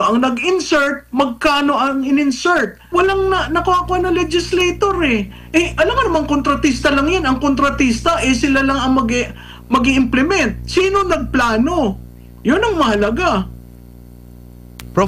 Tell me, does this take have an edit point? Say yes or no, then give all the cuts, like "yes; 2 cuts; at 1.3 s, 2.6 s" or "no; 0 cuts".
yes; 1 cut; at 2.8 s